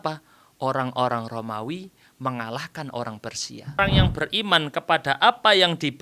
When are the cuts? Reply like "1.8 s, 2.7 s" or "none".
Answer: 3.8 s